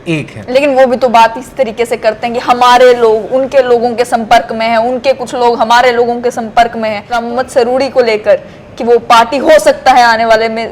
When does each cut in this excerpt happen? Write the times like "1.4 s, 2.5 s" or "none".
7.1 s